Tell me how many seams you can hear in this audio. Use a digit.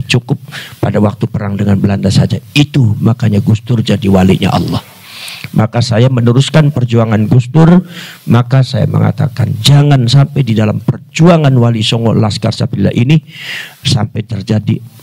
0